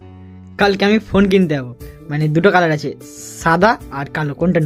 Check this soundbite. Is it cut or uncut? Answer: uncut